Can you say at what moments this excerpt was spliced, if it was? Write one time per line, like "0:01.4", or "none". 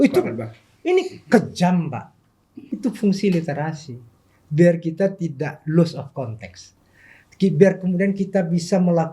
0:02.6